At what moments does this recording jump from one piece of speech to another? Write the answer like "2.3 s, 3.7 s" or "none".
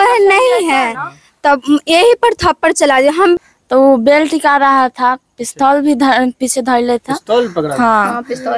3.4 s